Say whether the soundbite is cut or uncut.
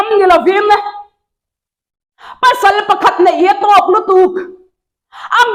uncut